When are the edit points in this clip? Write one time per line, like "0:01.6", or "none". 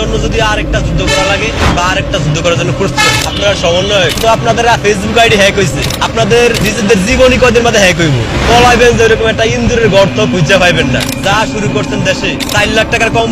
none